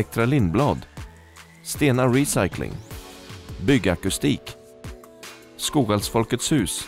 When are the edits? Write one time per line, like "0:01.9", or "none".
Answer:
none